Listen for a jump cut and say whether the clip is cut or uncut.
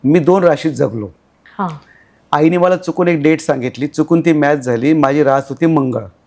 uncut